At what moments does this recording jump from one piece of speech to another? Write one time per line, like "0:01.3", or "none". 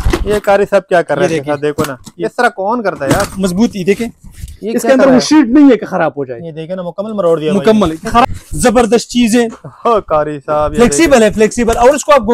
0:03.3
0:08.2